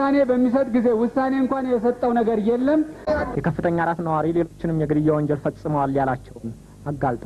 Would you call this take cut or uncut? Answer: cut